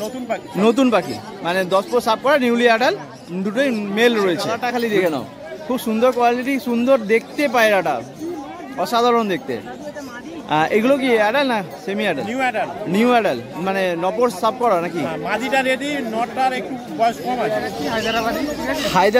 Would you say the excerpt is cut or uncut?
cut